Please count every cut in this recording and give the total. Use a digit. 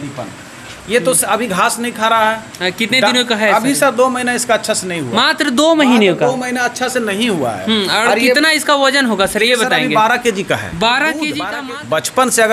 1